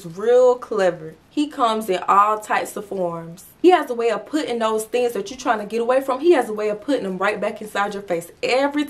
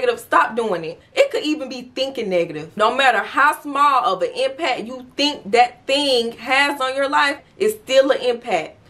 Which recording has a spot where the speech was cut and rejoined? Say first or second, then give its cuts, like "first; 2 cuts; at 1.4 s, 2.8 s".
second; 2 cuts; at 1.0 s, 2.7 s